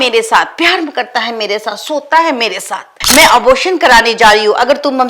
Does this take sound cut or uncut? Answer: cut